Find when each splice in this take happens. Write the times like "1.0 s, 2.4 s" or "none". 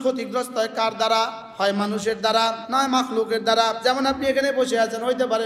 1.4 s, 2.6 s, 3.8 s